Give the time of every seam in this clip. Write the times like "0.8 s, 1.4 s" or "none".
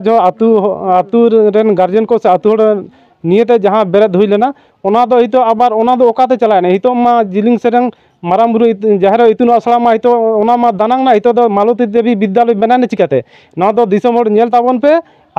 none